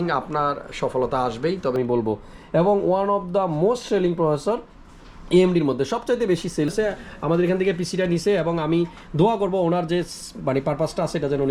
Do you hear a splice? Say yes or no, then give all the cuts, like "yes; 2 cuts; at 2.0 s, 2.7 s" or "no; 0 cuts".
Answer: yes; 2 cuts; at 1.8 s, 6.7 s